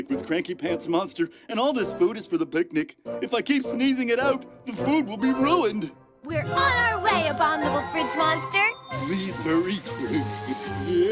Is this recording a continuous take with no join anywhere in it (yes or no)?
no